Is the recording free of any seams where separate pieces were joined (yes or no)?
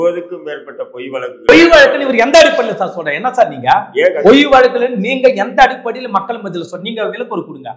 no